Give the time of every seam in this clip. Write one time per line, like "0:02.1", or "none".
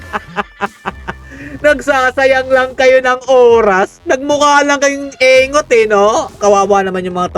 0:06.4